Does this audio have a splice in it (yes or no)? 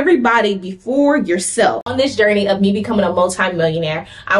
yes